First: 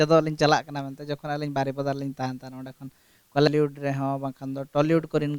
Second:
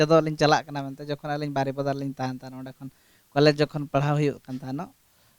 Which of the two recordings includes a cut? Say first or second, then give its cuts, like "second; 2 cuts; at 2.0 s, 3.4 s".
first; 1 cut; at 3.5 s